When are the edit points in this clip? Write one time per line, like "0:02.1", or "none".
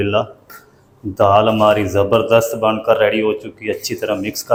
none